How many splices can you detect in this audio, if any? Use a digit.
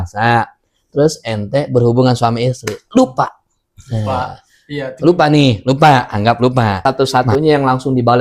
1